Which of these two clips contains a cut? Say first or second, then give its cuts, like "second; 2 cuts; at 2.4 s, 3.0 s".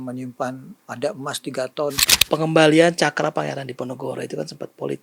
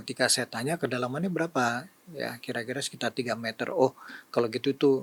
first; 1 cut; at 2.1 s